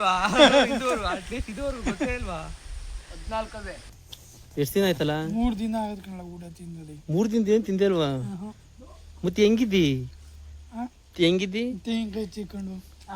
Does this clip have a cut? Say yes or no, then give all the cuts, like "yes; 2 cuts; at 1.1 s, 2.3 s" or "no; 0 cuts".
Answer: yes; 1 cut; at 3.9 s